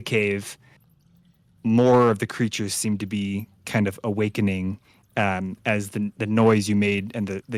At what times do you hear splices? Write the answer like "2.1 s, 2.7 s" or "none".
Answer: none

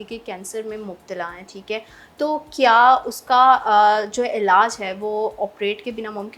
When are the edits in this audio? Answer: none

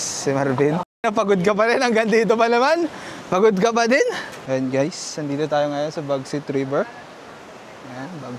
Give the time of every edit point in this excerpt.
4.3 s

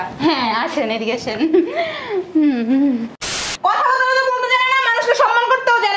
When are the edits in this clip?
3.2 s

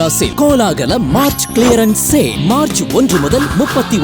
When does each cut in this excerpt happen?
none

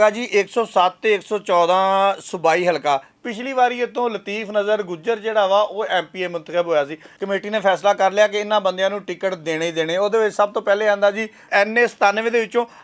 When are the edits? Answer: 3.1 s, 7.2 s, 11.5 s

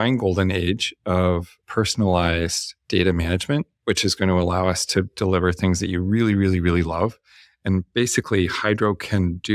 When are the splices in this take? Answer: 1.6 s

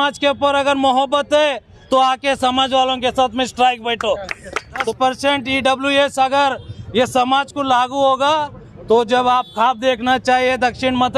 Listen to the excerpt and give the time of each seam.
1.7 s, 4.9 s

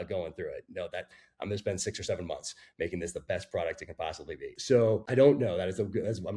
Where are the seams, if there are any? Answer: 4.9 s

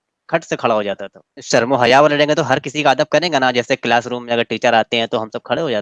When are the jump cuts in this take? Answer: 1.4 s

